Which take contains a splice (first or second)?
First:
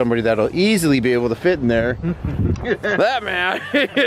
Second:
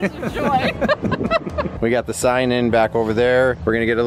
second